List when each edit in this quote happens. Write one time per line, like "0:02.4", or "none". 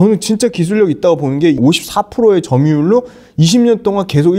0:01.6